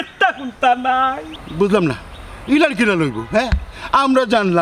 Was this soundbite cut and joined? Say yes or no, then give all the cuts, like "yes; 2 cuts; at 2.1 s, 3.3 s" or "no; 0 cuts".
no; 0 cuts